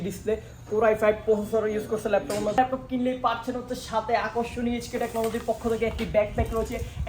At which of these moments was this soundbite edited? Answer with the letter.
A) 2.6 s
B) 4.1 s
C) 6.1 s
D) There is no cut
A